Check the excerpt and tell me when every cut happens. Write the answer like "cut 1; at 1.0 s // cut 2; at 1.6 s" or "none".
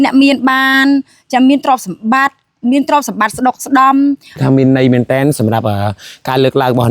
cut 1; at 4.4 s